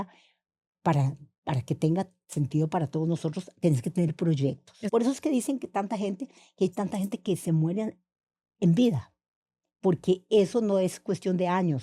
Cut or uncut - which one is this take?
cut